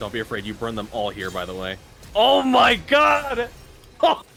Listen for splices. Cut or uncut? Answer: uncut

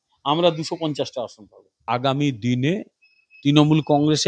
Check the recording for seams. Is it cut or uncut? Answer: cut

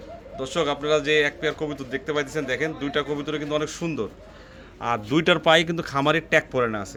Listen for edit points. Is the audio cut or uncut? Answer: uncut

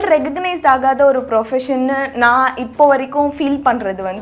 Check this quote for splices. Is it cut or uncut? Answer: uncut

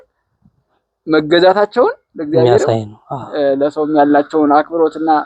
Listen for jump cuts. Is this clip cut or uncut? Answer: uncut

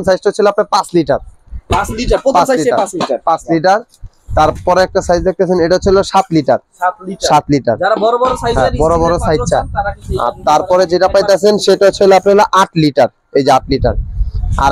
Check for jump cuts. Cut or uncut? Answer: uncut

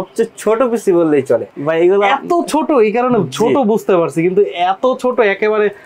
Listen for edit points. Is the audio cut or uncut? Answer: cut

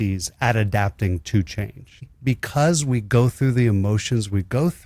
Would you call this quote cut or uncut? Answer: cut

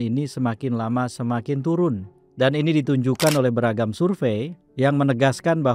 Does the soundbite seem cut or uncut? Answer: uncut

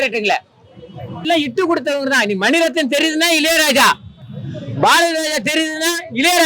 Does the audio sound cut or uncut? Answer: cut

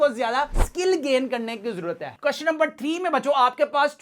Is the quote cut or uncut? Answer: cut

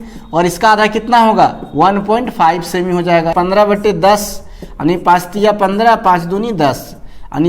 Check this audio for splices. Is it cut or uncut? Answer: cut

